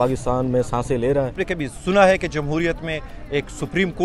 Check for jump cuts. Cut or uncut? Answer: cut